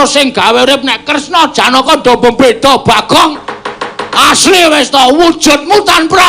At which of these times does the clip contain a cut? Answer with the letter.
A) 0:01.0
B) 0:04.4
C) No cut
B